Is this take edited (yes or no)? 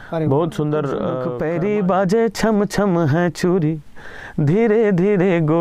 yes